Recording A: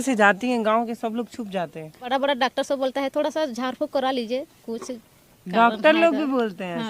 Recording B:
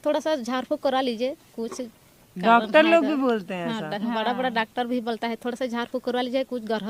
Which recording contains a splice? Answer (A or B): A